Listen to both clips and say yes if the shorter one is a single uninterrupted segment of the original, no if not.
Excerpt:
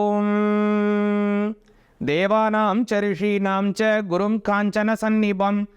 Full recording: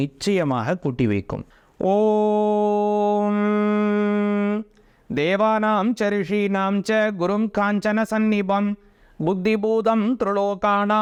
yes